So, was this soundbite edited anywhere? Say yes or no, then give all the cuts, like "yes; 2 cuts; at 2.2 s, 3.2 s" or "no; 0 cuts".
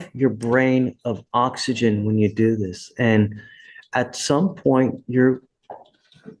no; 0 cuts